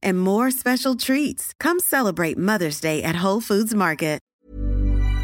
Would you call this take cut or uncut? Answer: cut